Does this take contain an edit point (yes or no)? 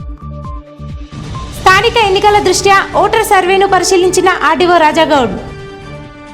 yes